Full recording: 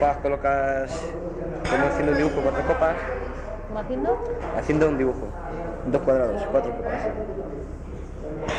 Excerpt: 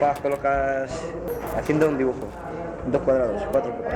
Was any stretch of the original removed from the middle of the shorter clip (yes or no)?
yes